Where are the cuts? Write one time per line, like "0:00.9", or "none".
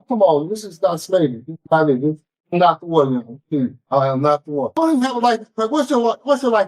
0:04.7